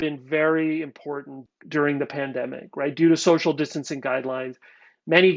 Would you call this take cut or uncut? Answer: cut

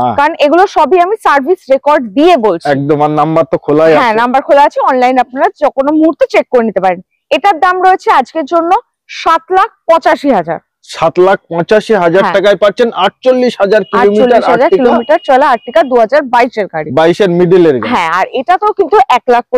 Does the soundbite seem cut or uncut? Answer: uncut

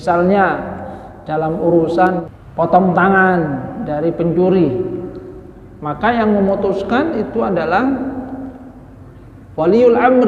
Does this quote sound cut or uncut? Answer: cut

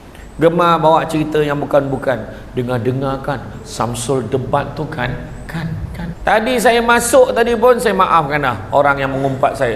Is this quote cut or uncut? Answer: cut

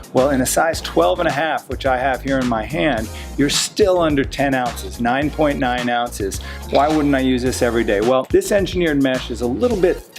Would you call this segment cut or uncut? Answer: cut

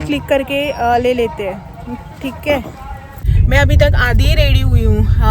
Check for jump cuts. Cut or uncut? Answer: cut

